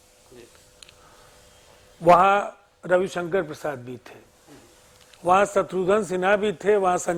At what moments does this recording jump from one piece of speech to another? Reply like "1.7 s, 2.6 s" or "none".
none